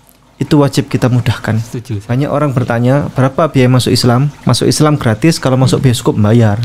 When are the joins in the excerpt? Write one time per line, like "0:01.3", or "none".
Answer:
0:02.0
0:04.3